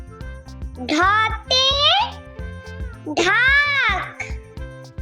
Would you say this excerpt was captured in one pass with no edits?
no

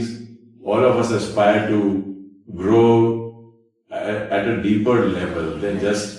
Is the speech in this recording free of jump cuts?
yes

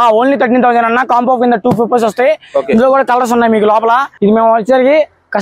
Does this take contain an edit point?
yes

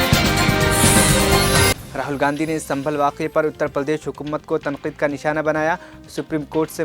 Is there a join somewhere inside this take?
yes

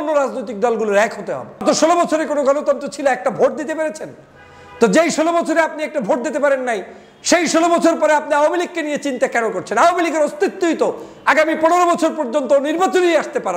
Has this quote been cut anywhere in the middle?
yes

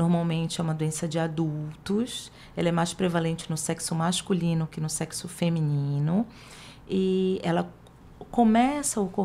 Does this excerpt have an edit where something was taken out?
no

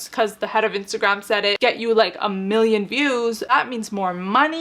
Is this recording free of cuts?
no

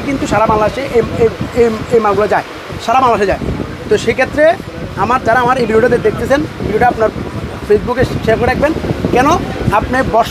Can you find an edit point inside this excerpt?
no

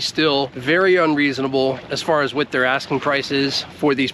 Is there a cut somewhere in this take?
no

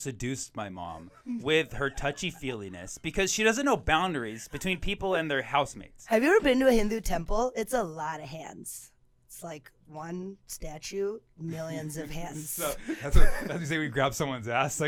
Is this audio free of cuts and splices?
yes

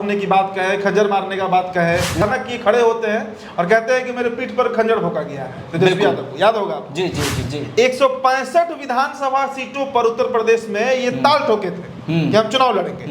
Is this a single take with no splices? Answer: no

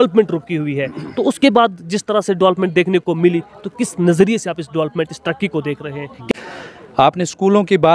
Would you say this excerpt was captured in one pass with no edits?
no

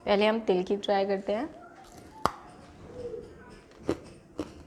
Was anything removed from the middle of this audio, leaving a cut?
no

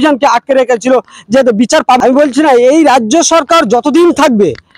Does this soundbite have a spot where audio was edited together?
yes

